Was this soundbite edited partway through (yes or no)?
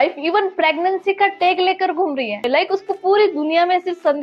yes